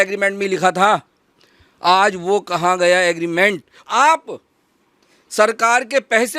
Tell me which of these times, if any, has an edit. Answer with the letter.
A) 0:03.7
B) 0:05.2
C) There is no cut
A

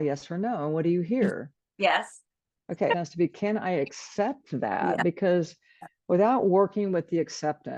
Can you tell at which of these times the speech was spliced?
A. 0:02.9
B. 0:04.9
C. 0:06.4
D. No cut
A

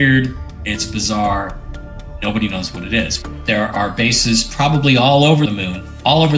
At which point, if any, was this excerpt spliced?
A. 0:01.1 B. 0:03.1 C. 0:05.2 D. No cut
B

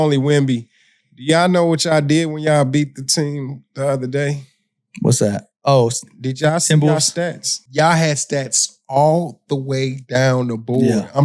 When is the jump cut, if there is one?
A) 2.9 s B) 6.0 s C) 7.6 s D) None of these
C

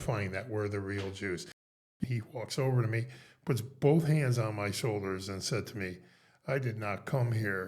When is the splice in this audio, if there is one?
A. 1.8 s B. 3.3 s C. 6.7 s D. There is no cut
A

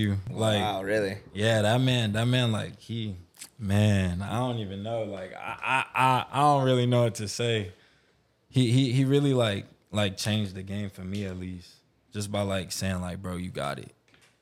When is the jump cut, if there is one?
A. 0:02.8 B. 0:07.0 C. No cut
C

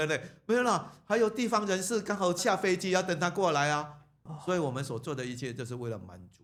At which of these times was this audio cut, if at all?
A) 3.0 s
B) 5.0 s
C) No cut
C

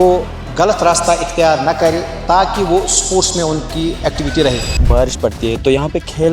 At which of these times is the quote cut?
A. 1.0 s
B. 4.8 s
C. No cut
B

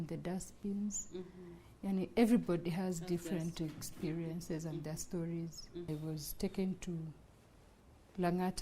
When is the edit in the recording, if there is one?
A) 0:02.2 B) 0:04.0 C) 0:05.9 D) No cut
C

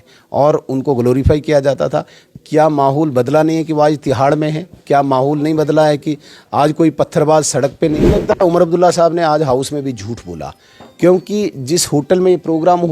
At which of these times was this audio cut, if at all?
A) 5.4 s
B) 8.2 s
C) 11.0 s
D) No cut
B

